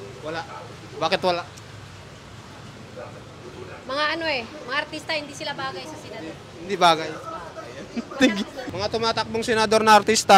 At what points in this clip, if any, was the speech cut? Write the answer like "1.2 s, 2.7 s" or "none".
8.6 s